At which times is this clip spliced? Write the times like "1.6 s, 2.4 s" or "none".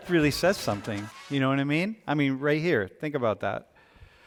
none